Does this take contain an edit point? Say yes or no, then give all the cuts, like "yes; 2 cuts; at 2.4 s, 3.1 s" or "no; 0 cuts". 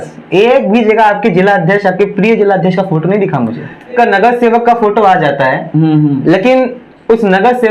yes; 1 cut; at 3.9 s